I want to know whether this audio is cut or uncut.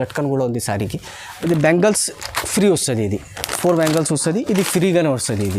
cut